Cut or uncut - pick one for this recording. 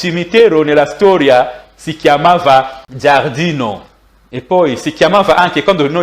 cut